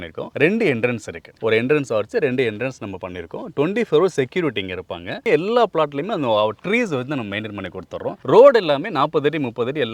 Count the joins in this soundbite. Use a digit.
1